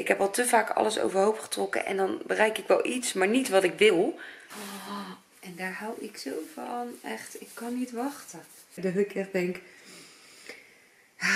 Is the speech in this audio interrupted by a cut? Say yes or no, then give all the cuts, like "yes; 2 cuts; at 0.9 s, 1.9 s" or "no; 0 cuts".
yes; 2 cuts; at 3.9 s, 8.7 s